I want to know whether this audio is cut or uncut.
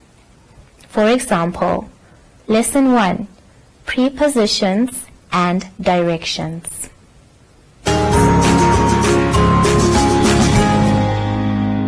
cut